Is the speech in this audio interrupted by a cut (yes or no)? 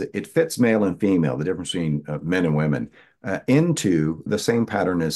yes